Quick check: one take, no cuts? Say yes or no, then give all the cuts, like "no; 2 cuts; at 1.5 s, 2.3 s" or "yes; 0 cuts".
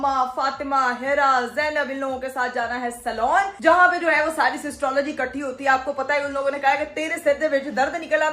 yes; 0 cuts